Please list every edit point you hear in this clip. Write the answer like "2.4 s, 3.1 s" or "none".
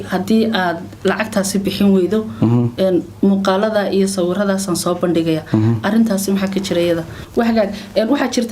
7.2 s